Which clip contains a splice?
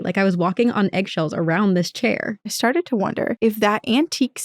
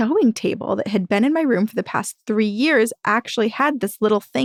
first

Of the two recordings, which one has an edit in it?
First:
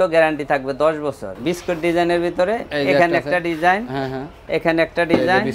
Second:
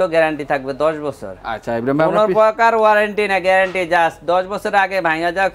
first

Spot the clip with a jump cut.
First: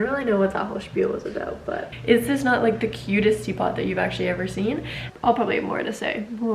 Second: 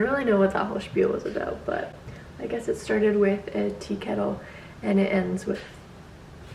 first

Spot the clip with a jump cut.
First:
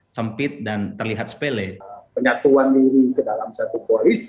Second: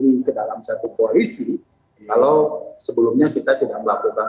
first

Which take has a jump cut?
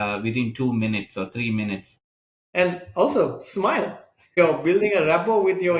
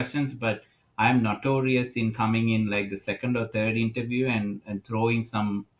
first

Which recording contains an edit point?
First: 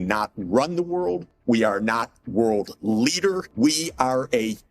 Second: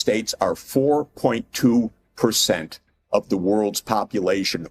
first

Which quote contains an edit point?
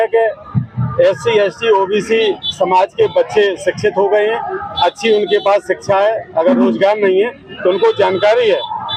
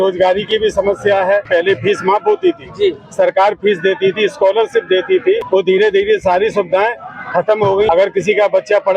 second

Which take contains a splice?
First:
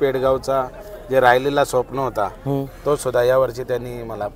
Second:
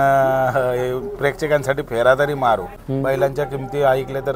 second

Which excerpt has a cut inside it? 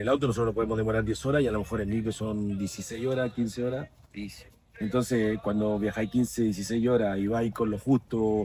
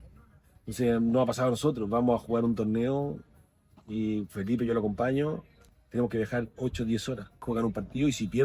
second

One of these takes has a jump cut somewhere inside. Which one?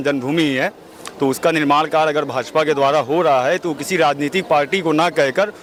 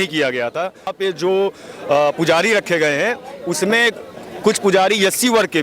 second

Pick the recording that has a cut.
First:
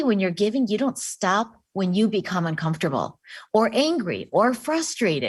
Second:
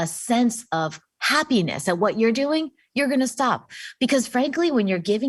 second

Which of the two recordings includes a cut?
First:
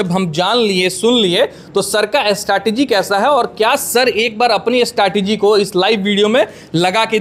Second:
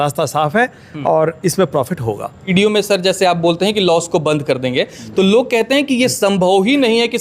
second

